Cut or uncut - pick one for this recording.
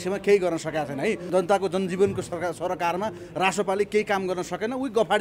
cut